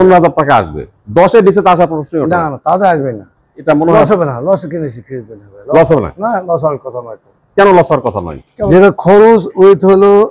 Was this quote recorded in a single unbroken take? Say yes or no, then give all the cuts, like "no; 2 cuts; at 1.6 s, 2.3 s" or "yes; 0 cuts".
no; 2 cuts; at 3.6 s, 8.5 s